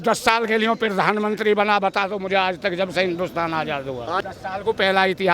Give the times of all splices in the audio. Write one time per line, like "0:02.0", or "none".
0:04.2

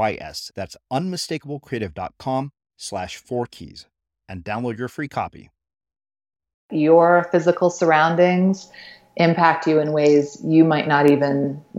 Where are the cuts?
0:06.7

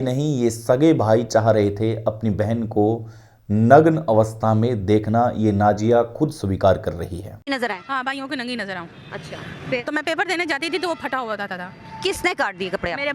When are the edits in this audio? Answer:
0:07.5

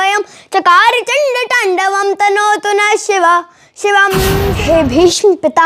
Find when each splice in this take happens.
0:04.5

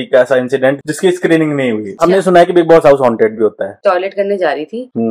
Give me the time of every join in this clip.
0:00.8
0:02.0
0:03.8

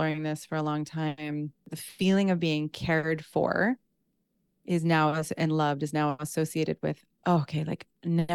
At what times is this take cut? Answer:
0:01.8

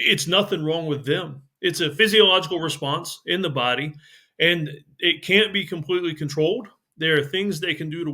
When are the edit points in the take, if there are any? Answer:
0:01.9

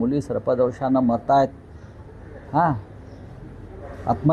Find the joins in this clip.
none

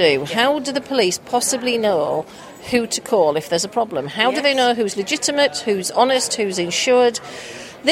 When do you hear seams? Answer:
none

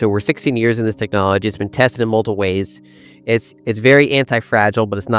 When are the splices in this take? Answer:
none

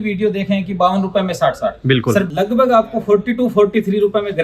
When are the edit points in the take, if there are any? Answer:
0:02.3

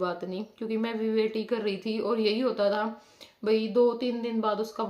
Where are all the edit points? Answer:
none

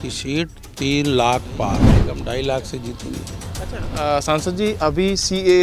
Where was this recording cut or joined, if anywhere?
0:01.9

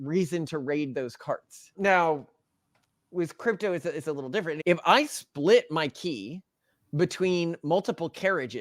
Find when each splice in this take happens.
0:01.6
0:04.6

